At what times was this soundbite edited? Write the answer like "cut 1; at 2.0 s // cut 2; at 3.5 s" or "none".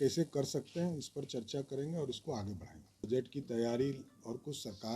cut 1; at 3.0 s